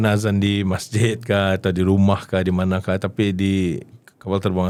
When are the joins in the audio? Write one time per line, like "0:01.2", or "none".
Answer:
none